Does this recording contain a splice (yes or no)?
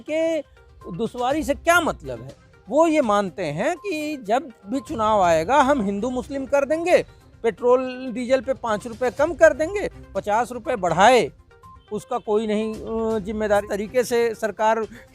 yes